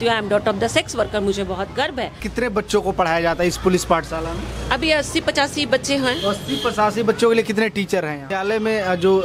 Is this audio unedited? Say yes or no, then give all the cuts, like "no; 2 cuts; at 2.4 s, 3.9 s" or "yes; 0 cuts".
no; 2 cuts; at 2.2 s, 8.3 s